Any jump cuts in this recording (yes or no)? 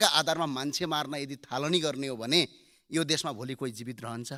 no